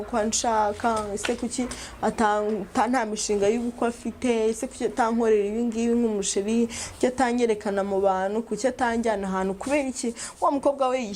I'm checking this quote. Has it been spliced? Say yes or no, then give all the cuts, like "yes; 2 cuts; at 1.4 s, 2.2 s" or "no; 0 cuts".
no; 0 cuts